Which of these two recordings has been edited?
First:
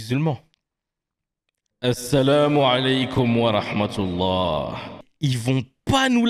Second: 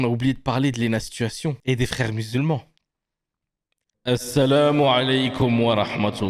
first; 1 cut; at 5.0 s

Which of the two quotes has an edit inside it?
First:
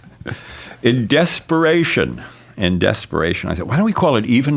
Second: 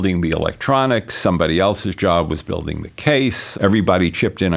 second; 1 cut; at 3.4 s

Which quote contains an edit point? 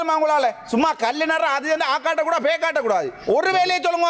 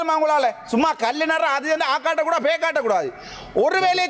first; 1 cut; at 3.1 s

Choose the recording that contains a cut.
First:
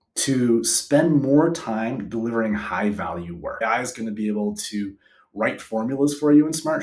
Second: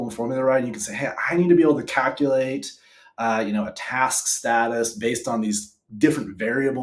first; 1 cut; at 3.6 s

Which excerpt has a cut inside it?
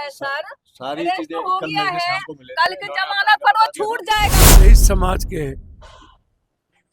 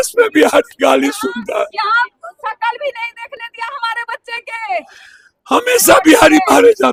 first; 1 cut; at 4.6 s

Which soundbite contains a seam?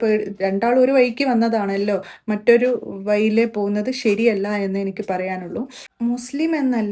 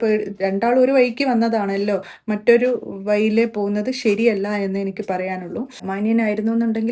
second; 1 cut; at 5.8 s

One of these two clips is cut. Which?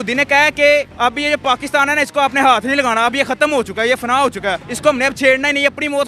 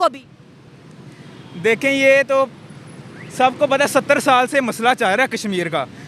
first; 2 cuts; at 0.9 s, 4.7 s

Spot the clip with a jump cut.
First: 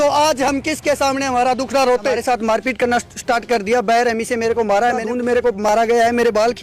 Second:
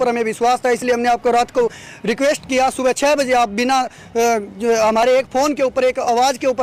first; 2 cuts; at 2.2 s, 5.1 s

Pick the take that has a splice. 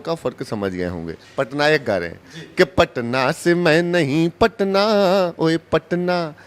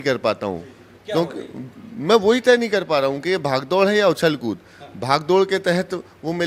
first; 1 cut; at 1.2 s

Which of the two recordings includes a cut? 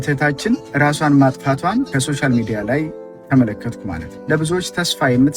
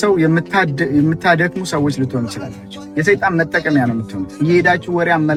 first; 1 cut; at 4.1 s

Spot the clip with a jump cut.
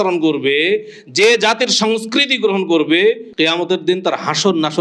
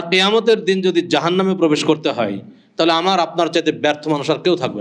first; 1 cut; at 3.3 s

